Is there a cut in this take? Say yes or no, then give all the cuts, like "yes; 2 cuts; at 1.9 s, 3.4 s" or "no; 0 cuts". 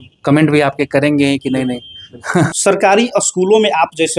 yes; 1 cut; at 2.5 s